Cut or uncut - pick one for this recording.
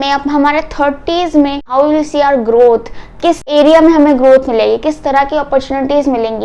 cut